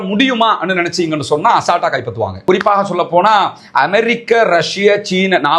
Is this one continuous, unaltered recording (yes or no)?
no